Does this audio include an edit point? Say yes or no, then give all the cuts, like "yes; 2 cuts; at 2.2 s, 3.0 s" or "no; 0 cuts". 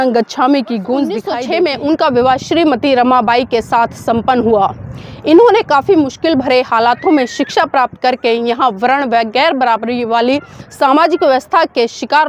yes; 1 cut; at 1.3 s